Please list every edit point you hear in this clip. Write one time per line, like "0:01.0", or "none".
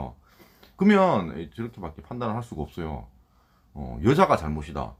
none